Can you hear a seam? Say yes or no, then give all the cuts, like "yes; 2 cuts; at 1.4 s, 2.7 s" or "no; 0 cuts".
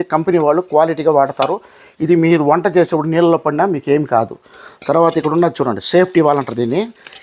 no; 0 cuts